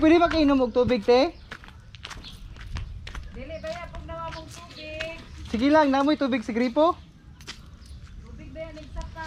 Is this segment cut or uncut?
uncut